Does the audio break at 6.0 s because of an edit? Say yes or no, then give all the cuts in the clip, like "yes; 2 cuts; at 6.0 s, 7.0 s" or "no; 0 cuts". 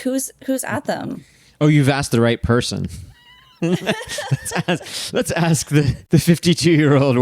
yes; 1 cut; at 6.0 s